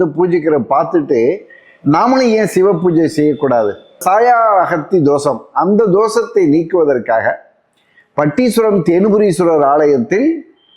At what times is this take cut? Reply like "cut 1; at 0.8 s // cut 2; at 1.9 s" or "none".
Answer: cut 1; at 4.0 s